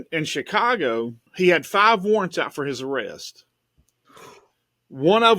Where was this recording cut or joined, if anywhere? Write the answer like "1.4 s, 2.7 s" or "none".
1.2 s